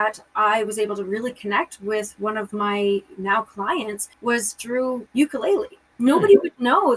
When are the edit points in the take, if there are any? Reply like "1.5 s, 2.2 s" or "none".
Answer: 4.0 s, 5.0 s, 5.8 s